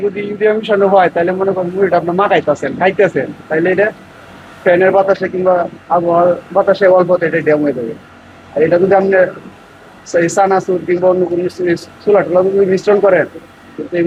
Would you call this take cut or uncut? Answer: uncut